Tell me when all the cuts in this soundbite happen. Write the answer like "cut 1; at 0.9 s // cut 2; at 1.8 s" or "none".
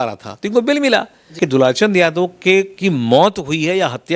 cut 1; at 1.3 s